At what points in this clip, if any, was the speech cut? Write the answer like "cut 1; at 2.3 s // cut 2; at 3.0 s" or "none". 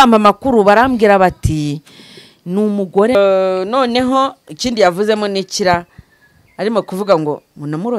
cut 1; at 3.1 s